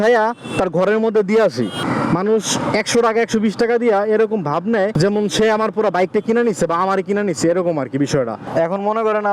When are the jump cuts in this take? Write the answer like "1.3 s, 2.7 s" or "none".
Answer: 1.8 s, 4.9 s, 8.4 s